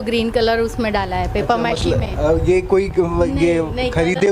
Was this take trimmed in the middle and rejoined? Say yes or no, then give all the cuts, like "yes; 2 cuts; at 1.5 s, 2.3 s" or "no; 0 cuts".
no; 0 cuts